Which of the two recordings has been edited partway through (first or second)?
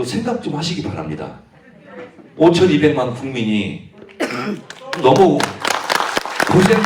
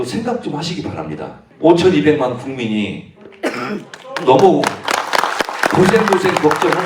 second